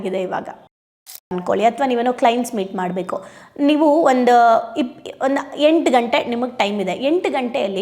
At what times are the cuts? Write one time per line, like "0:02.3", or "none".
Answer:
0:01.2